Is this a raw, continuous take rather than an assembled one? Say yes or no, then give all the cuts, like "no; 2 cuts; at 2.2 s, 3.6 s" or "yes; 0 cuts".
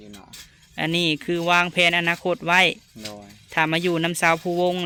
yes; 0 cuts